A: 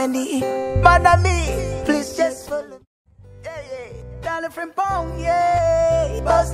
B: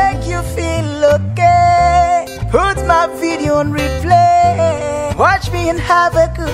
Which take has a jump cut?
A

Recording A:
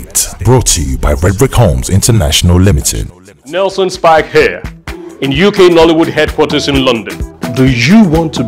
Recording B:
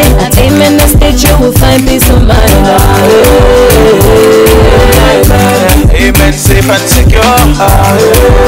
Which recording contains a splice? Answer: A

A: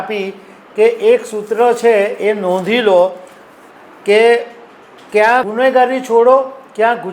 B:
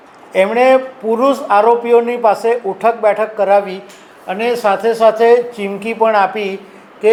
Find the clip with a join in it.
A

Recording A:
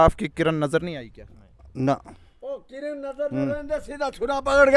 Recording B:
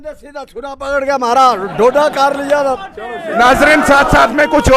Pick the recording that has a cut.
B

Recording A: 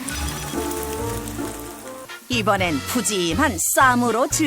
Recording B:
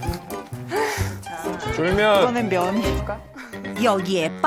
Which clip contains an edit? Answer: A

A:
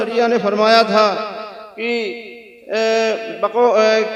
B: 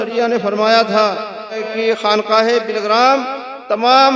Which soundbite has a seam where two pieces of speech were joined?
B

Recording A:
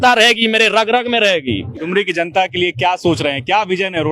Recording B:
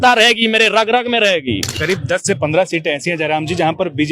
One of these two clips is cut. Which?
B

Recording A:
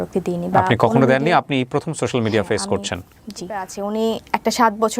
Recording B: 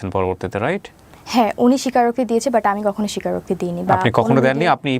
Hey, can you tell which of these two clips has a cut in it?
A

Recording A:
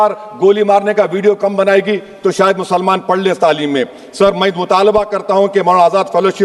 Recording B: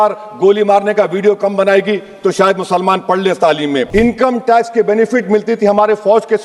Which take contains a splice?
B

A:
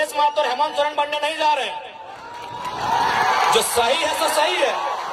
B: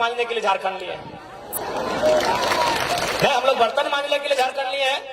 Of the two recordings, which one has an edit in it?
B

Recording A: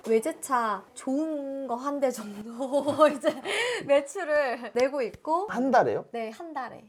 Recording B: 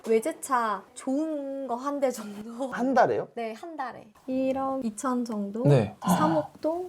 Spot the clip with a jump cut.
B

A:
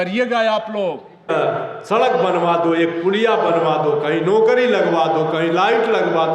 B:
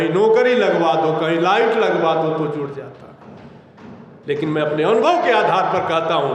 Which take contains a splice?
A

